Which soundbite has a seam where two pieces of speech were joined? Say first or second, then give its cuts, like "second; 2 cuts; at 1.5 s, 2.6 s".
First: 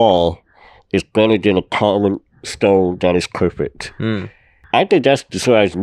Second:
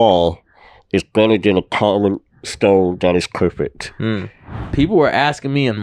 second; 1 cut; at 4.6 s